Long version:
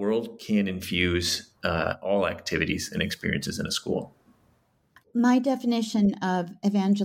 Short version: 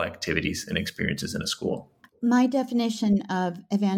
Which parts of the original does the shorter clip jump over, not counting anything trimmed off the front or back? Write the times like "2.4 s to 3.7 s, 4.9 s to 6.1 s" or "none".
4.2 s to 4.9 s